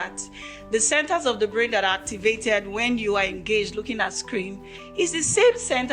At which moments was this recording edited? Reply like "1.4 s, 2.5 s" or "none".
none